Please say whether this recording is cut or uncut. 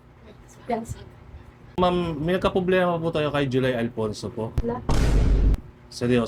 cut